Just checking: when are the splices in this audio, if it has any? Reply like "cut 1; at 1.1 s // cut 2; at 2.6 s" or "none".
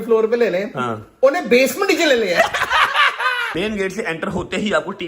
cut 1; at 3.4 s